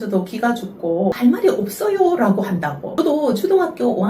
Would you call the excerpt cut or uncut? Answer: cut